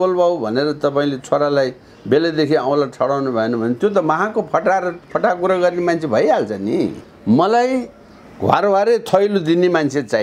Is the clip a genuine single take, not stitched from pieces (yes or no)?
no